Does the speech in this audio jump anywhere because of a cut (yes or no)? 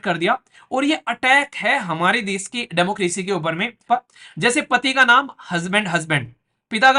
yes